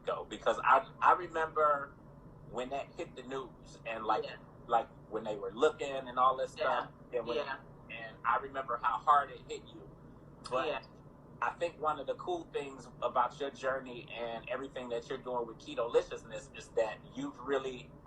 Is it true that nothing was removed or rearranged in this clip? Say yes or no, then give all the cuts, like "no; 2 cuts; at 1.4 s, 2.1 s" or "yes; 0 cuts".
yes; 0 cuts